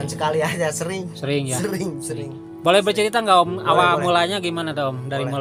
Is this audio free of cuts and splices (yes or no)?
yes